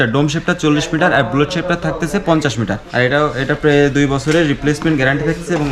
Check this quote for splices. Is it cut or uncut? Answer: cut